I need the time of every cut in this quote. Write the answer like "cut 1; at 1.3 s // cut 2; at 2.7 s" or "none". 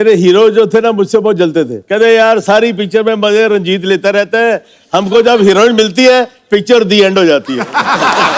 cut 1; at 1.8 s